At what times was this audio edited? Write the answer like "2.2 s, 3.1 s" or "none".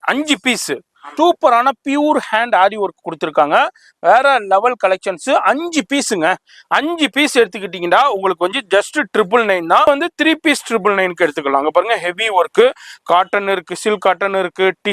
1.0 s, 9.9 s